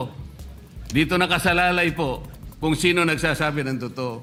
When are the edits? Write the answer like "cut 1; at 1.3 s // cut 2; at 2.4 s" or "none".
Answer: none

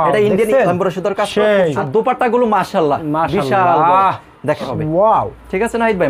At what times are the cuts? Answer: cut 1; at 1.8 s // cut 2; at 4.7 s

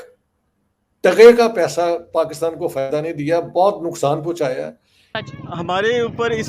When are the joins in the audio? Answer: cut 1; at 5.2 s

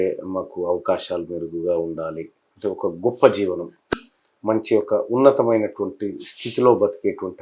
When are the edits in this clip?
cut 1; at 3.9 s

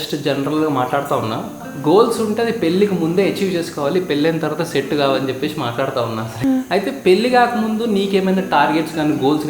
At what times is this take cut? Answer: cut 1; at 1.7 s // cut 2; at 6.3 s

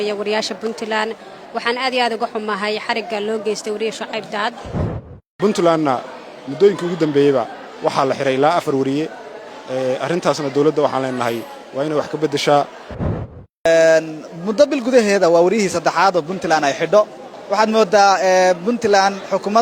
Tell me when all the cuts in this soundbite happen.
cut 1; at 5.2 s // cut 2; at 12.9 s

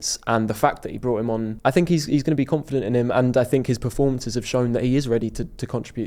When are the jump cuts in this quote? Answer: cut 1; at 1.5 s

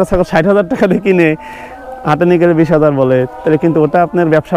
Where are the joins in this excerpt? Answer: none

